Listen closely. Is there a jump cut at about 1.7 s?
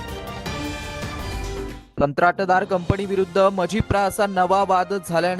yes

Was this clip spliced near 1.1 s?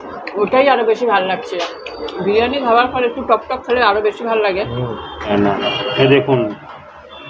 no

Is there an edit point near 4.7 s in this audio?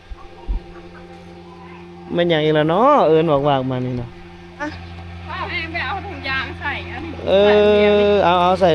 yes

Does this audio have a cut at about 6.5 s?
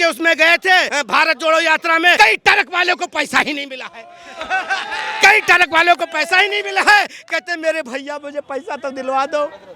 no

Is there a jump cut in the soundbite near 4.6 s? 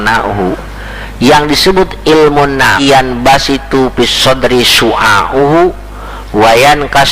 no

